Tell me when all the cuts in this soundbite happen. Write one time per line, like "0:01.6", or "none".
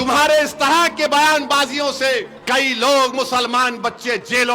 0:02.3